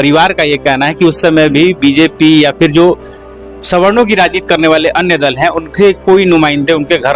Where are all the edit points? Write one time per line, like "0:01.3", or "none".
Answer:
none